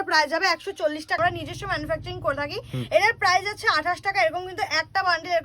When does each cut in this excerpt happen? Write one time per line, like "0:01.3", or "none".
0:01.2